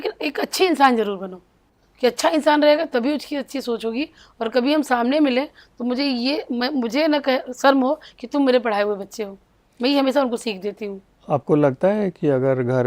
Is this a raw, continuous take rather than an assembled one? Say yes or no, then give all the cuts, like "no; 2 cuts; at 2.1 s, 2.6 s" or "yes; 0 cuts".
yes; 0 cuts